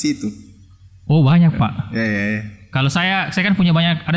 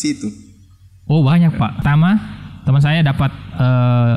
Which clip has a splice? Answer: second; 1 cut; at 1.8 s

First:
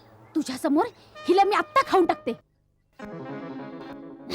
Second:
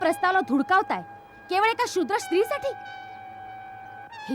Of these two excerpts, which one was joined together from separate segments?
first; 1 cut; at 2.5 s

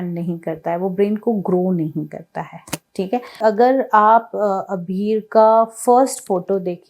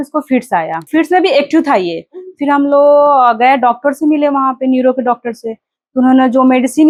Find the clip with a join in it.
first; 1 cut; at 3.4 s

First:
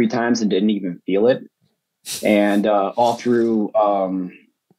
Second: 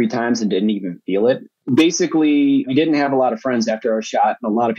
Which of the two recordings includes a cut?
second; 2 cuts; at 1.6 s, 2.7 s

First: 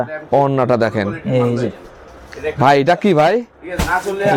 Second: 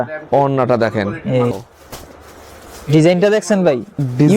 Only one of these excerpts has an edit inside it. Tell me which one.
second; 1 cut; at 1.5 s

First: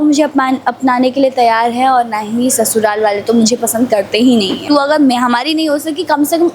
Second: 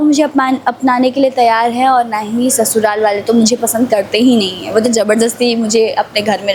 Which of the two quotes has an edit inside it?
first; 1 cut; at 4.6 s

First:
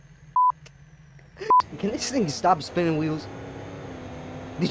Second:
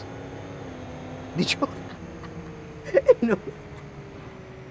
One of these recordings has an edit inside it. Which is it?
first; 1 cut; at 1.5 s

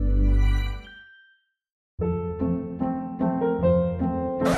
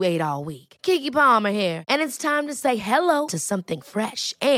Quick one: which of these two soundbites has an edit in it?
first; 1 cut; at 1.8 s

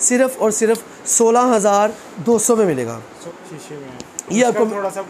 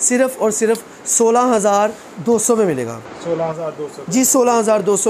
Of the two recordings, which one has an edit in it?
first; 1 cut; at 3.3 s

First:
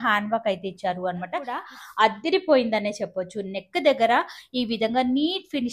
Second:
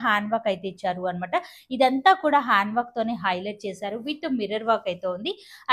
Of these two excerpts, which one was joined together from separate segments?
first; 1 cut; at 1.6 s

